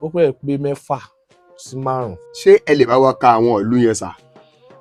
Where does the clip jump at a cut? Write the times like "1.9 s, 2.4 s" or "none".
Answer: none